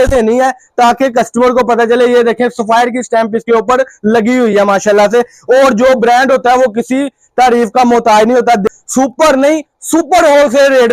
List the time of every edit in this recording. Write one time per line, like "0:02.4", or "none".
0:08.6